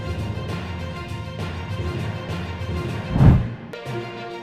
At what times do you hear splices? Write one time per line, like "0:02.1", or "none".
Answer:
0:03.0
0:03.5